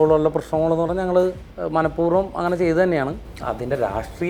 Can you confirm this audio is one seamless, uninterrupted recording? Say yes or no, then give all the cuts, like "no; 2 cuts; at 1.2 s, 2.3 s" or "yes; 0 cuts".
no; 2 cuts; at 1.5 s, 3.2 s